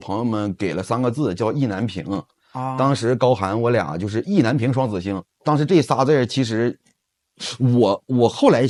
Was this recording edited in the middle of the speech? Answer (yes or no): no